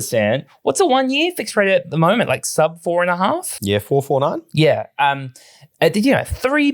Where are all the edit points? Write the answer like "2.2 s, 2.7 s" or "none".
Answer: none

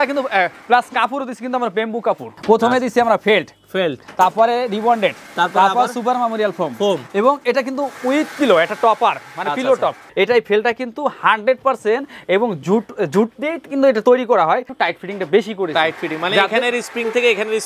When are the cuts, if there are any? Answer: 2.3 s, 10.0 s, 14.7 s

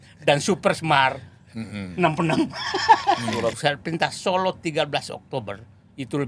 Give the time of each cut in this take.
3.6 s

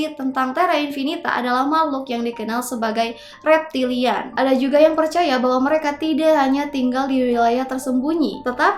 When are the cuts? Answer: 4.3 s

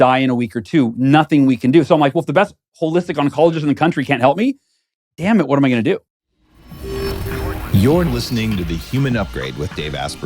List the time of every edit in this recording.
6.2 s

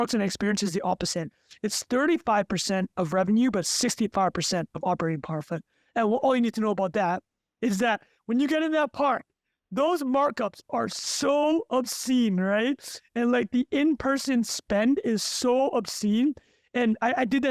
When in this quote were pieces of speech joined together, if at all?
none

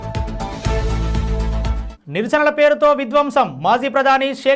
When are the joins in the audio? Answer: 1.8 s

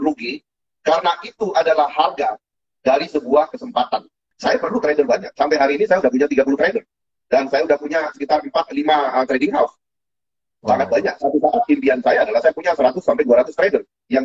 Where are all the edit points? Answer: 4.3 s

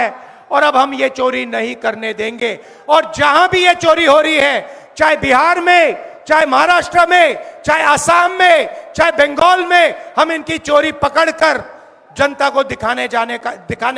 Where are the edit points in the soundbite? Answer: none

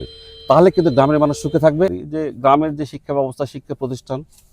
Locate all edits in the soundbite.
2.0 s

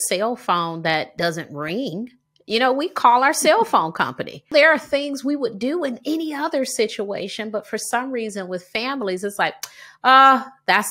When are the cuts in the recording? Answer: 1.1 s, 4.5 s

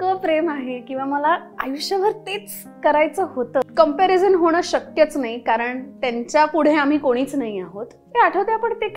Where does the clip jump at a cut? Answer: 3.6 s, 8.0 s

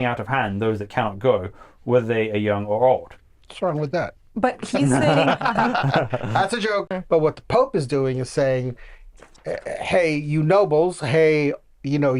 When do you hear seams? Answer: 6.9 s

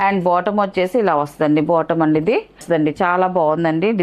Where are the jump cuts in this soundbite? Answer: 2.6 s

